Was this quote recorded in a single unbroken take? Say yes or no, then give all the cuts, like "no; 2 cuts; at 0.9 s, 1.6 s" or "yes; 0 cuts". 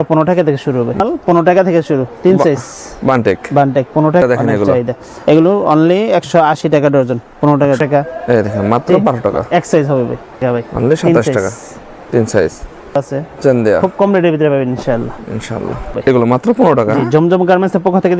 no; 6 cuts; at 1.0 s, 4.2 s, 7.8 s, 10.4 s, 13.0 s, 16.0 s